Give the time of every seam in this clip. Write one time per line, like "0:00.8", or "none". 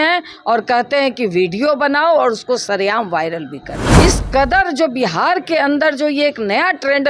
0:03.8